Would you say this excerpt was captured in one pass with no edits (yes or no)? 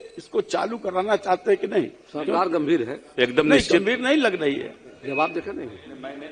yes